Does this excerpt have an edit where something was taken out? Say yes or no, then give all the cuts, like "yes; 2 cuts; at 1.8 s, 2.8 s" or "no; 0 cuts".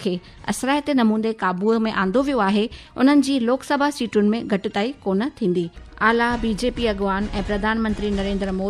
yes; 1 cut; at 5.8 s